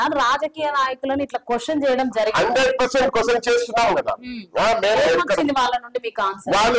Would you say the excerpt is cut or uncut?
uncut